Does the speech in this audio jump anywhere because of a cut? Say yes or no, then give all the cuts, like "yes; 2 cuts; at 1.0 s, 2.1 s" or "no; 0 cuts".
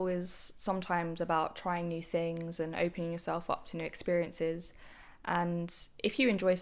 no; 0 cuts